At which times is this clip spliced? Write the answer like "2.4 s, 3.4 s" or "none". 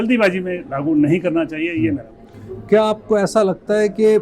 none